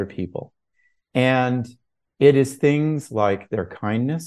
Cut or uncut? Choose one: uncut